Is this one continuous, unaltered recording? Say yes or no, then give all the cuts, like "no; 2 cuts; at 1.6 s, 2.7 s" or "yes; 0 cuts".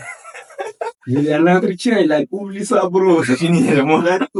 yes; 0 cuts